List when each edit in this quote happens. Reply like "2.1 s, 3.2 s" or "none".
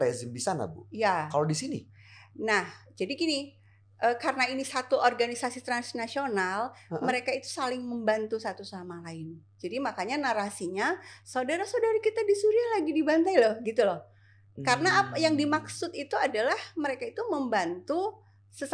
none